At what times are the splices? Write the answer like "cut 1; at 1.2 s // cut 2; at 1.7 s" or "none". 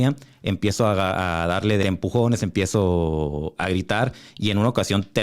cut 1; at 1.8 s